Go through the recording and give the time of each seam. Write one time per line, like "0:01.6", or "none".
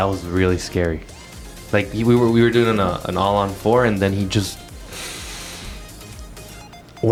none